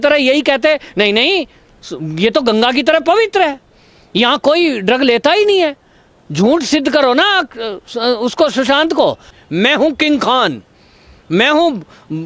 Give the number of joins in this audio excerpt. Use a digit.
1